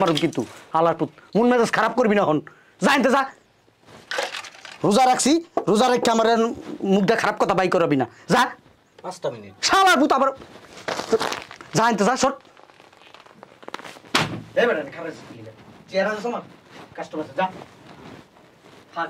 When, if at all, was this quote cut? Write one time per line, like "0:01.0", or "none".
none